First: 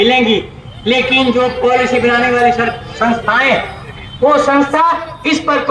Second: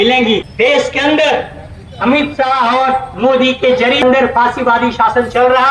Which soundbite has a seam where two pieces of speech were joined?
second; 2 cuts; at 0.8 s, 4.0 s

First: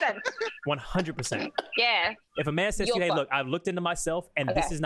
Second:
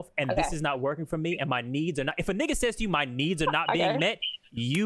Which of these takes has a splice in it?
first; 1 cut; at 2.2 s

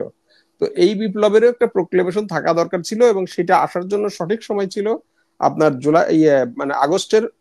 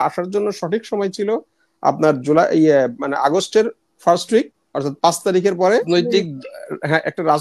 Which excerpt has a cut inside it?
second; 1 cut; at 5.9 s

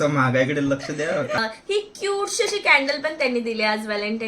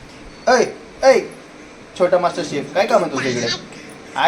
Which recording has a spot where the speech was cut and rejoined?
first; 1 cut; at 1.4 s

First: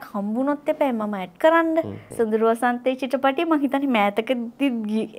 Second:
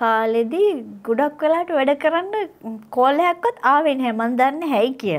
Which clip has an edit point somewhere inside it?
first; 1 cut; at 2.0 s

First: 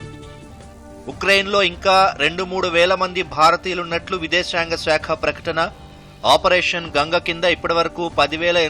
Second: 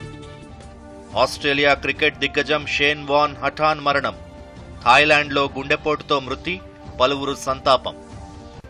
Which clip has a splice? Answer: first; 1 cut; at 1.0 s

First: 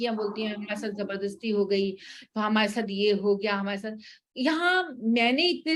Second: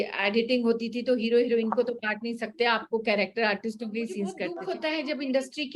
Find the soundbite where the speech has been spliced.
second; 1 cut; at 4.5 s

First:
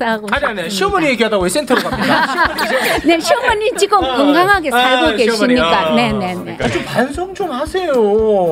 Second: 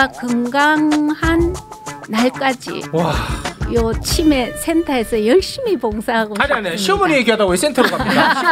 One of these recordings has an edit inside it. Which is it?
first; 1 cut; at 6.5 s

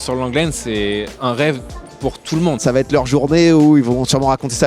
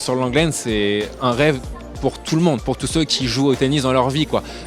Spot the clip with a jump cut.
first; 1 cut; at 2.6 s

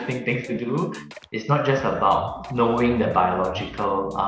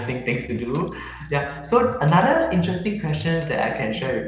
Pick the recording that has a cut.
first; 1 cut; at 1.1 s

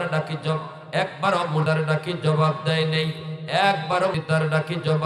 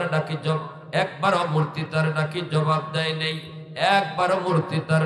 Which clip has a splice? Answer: first; 2 cuts; at 1.6 s, 4.1 s

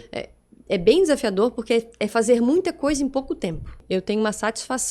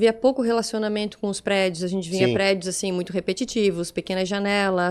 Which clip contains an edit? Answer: first; 1 cut; at 3.8 s

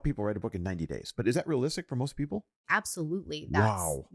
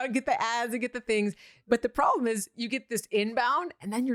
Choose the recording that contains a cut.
first; 1 cut; at 2.6 s

